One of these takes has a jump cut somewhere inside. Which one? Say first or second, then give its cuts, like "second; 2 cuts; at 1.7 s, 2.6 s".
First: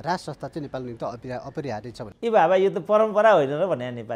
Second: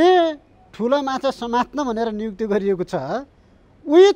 first; 1 cut; at 2.1 s